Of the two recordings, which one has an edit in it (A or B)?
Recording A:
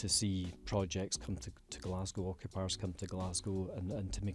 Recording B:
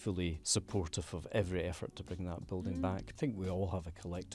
B